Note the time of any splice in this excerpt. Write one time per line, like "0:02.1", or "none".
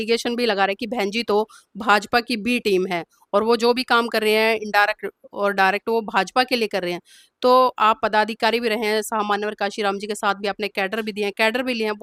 none